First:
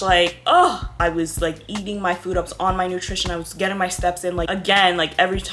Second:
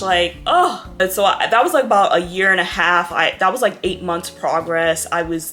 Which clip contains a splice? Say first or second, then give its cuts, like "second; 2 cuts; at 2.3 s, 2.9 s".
first; 2 cuts; at 0.9 s, 4.5 s